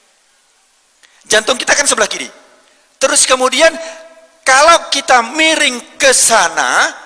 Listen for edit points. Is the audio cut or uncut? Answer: uncut